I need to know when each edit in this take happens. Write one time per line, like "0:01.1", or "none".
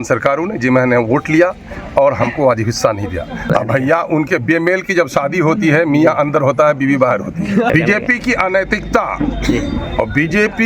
0:03.5
0:07.7